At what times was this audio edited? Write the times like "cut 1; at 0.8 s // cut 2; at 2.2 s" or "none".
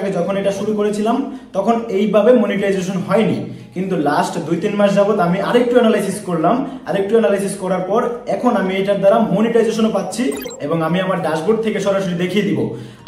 cut 1; at 10.5 s